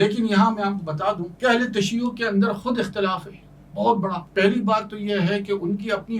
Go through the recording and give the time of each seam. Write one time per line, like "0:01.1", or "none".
0:01.3
0:04.2